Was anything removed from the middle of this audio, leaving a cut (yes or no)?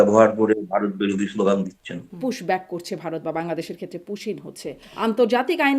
yes